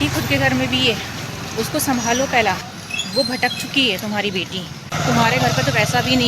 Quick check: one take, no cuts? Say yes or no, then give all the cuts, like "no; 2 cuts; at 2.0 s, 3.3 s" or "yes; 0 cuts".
no; 1 cut; at 4.9 s